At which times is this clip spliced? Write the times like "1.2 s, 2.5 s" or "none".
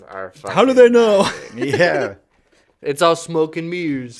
none